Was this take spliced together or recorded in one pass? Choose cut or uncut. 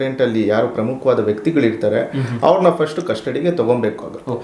uncut